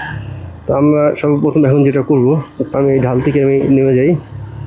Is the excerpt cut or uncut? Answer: cut